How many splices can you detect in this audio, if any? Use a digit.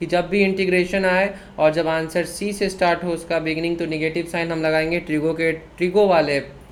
0